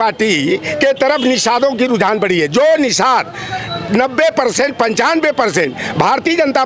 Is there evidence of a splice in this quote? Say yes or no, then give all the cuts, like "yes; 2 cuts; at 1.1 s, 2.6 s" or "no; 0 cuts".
no; 0 cuts